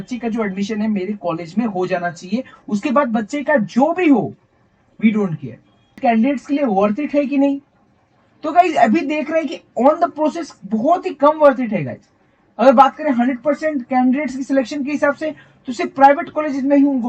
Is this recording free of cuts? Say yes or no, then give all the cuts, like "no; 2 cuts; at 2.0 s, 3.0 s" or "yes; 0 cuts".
no; 1 cut; at 5.9 s